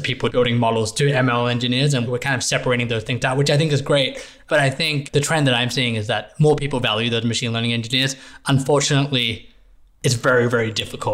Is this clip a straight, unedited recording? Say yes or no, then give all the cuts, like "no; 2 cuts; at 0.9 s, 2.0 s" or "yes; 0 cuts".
yes; 0 cuts